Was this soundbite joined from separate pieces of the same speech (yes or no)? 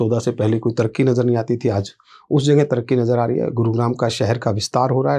no